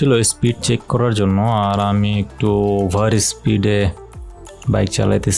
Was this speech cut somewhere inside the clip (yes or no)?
no